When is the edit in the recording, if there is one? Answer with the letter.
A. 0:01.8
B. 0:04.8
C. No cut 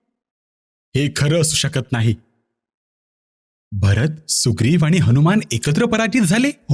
C